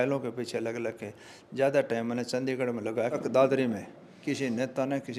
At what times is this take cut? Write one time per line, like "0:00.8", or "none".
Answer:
0:03.2